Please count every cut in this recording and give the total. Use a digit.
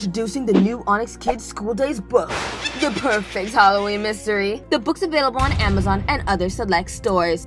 1